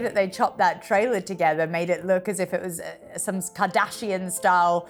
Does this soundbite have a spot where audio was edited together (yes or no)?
no